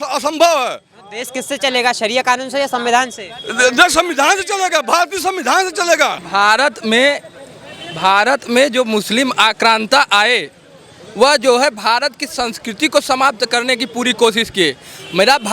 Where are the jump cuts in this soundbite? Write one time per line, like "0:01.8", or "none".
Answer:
0:06.2